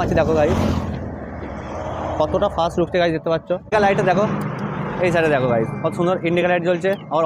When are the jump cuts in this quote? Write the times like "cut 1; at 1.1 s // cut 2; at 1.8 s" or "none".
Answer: cut 1; at 3.7 s